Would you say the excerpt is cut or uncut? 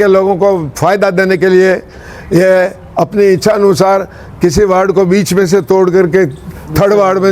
uncut